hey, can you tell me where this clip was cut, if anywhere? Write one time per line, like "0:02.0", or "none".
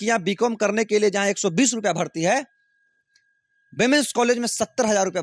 none